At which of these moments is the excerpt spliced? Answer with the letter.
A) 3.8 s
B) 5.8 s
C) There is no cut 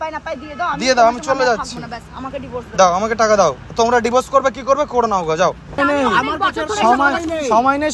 B